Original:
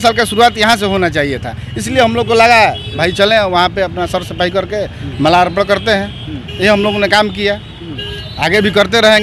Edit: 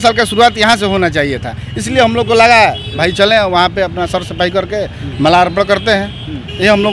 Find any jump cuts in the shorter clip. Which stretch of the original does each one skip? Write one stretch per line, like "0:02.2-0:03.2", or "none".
none